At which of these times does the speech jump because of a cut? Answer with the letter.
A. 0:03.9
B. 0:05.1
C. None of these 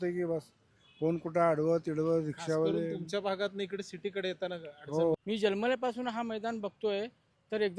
B